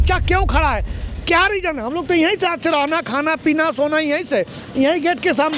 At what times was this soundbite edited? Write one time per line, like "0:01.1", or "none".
none